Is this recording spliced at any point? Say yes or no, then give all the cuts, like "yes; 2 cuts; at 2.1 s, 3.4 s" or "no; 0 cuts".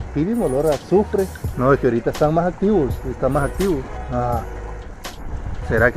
yes; 2 cuts; at 1.4 s, 4.0 s